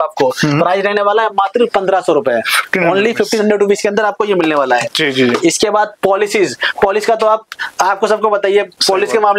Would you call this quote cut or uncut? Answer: uncut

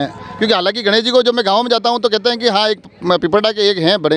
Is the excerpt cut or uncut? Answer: uncut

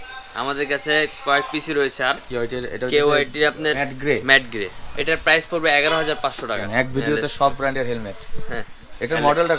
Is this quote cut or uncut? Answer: cut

